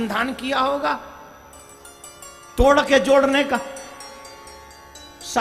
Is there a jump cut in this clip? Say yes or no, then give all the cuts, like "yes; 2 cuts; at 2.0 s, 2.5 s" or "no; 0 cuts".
no; 0 cuts